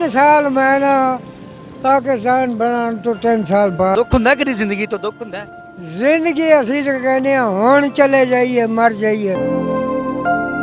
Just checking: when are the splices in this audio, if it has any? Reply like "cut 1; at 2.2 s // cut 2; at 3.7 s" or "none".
cut 1; at 4.0 s // cut 2; at 9.4 s